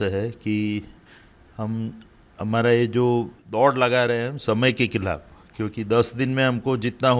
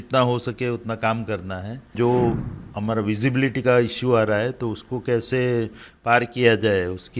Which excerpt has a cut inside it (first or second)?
second